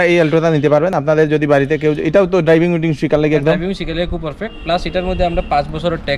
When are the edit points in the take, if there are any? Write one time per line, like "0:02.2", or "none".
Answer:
none